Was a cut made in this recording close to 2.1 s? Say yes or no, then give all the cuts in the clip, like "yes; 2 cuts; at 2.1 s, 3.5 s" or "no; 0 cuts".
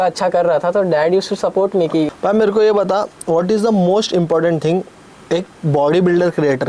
yes; 1 cut; at 2.1 s